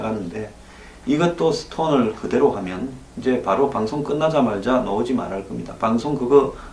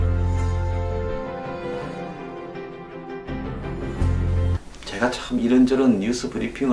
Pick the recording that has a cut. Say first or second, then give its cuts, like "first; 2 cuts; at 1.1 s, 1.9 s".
first; 1 cut; at 1.2 s